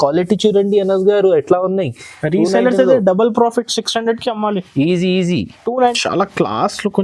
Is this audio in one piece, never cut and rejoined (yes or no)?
no